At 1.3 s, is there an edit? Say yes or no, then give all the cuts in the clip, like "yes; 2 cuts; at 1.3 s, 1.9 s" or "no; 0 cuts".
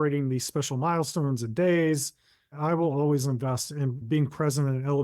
no; 2 cuts; at 2.6 s, 4.0 s